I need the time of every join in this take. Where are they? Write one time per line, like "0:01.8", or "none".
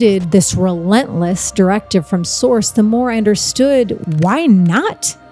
0:04.0